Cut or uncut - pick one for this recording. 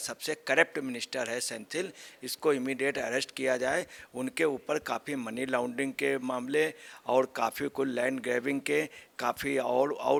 uncut